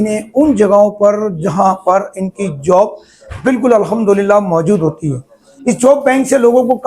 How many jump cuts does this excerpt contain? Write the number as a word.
one